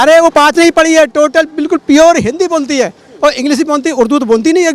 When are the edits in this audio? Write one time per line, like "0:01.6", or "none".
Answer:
none